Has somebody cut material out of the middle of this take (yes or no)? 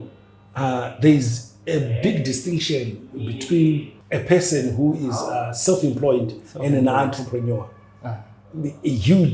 yes